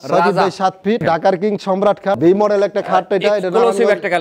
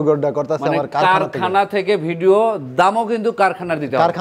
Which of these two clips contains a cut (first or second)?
first